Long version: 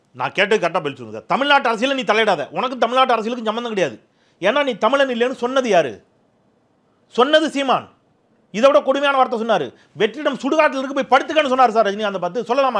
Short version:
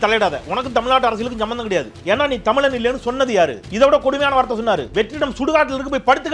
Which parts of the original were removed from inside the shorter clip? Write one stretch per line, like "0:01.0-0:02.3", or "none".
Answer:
0:04.0-0:04.3
0:06.0-0:08.5
0:09.7-0:09.9